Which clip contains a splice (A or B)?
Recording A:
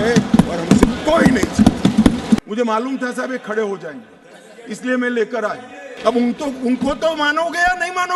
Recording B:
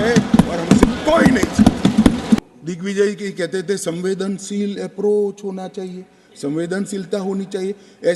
A